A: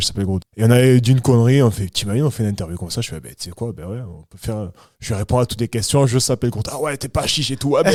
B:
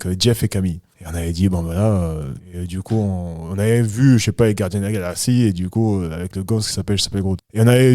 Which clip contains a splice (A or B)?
B